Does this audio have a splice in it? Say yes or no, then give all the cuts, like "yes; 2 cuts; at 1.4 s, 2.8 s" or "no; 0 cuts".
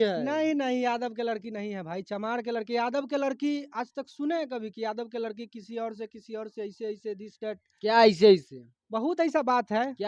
no; 0 cuts